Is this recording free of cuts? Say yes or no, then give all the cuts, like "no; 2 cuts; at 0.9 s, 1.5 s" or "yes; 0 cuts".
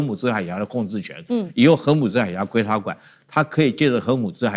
yes; 0 cuts